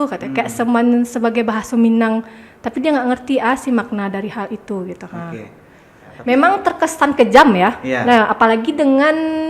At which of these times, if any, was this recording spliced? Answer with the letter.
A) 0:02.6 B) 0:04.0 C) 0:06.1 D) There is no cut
C